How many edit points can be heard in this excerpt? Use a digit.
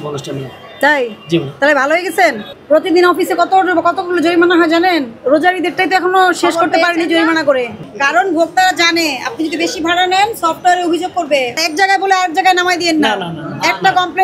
3